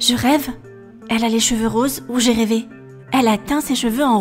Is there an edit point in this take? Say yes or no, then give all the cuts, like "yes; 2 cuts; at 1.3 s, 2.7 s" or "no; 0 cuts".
yes; 1 cut; at 2.9 s